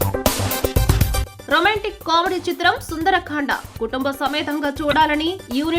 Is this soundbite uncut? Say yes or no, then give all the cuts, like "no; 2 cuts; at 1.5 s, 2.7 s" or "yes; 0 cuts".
yes; 0 cuts